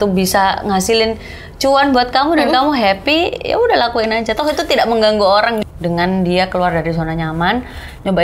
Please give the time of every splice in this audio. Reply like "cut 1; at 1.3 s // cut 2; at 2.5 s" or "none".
cut 1; at 5.6 s